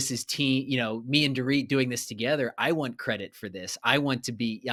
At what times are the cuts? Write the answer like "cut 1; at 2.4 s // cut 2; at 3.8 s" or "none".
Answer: none